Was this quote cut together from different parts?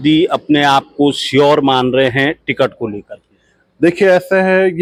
no; 0 cuts

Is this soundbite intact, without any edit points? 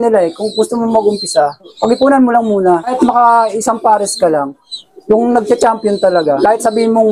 no; 5 cuts; at 1.7 s, 2.9 s, 4.7 s, 5.5 s, 6.4 s

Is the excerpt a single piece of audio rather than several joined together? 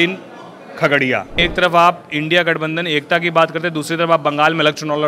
no; 1 cut; at 1.4 s

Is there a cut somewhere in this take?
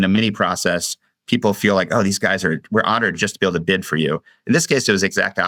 no; 0 cuts

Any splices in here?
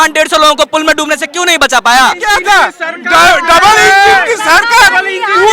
yes; 1 cut; at 2.2 s

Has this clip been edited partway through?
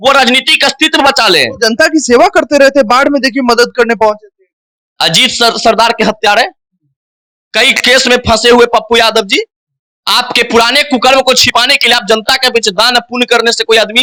no; 0 cuts

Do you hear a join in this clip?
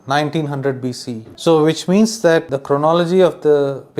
yes; 2 cuts; at 1.3 s, 2.5 s

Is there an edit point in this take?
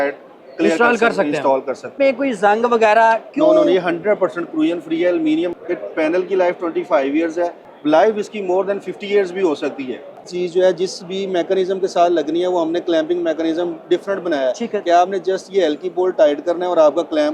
yes; 4 cuts; at 1.9 s, 5.5 s, 7.6 s, 10.3 s

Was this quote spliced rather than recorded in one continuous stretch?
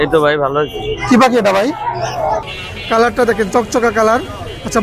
yes; 1 cut; at 2.4 s

